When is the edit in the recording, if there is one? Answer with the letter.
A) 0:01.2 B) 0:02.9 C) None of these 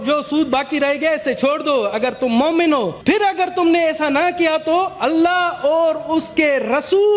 B